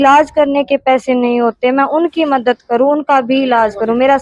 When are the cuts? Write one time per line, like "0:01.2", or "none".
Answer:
none

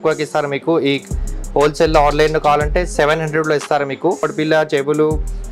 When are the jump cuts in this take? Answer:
0:04.3

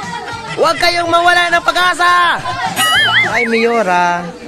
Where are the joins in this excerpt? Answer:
0:03.2

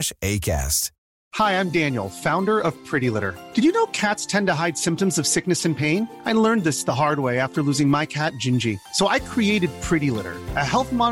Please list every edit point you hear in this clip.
0:01.2

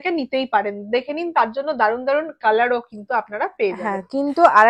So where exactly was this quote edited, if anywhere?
none

